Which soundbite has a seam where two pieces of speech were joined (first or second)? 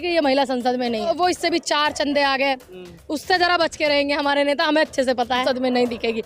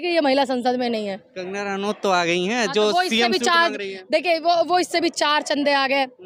first